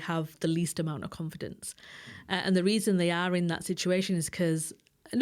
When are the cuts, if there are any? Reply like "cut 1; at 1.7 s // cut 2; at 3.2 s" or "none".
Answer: none